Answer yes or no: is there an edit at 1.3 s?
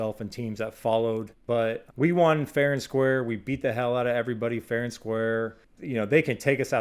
yes